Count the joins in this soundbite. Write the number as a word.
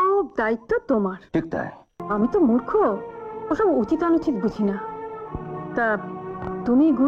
one